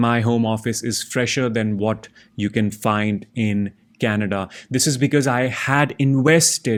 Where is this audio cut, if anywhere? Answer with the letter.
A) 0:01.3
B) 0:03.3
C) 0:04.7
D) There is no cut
D